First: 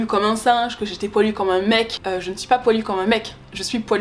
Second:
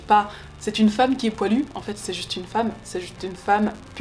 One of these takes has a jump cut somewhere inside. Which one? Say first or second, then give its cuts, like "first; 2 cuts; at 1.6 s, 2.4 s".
first; 1 cut; at 2.0 s